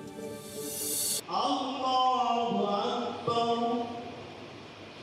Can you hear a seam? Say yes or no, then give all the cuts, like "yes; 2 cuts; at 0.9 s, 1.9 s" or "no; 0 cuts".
yes; 1 cut; at 1.1 s